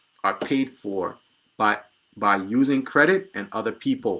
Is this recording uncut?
yes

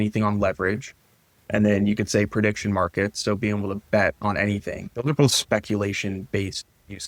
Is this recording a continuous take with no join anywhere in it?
yes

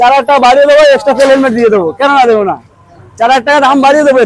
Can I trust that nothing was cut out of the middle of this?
yes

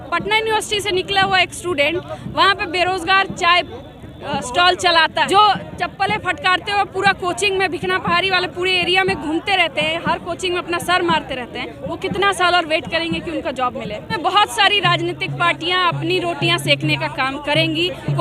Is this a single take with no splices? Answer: no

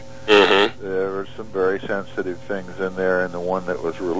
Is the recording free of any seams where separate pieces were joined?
no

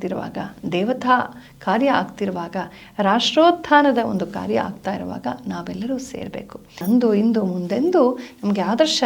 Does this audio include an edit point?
yes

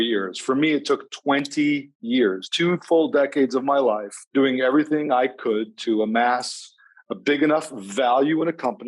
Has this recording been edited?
yes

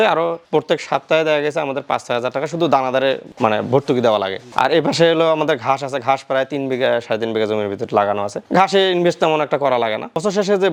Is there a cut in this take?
no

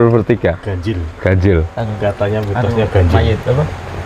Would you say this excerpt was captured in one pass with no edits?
yes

